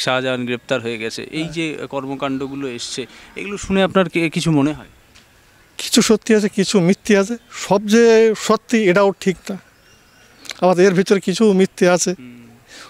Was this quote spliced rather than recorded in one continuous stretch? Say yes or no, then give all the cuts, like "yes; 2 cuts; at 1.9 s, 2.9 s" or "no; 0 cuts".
no; 0 cuts